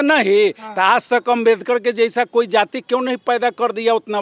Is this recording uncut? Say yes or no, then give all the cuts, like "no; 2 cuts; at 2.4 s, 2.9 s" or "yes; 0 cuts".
yes; 0 cuts